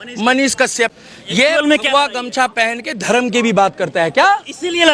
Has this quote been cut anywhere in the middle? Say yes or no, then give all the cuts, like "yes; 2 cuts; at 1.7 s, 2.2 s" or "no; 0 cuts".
yes; 1 cut; at 0.9 s